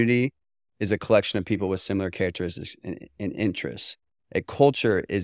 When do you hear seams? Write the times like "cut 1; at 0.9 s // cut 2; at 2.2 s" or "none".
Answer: none